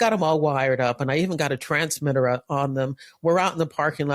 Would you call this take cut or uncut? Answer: uncut